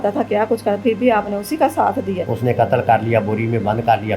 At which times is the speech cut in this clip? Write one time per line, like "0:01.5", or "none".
0:02.3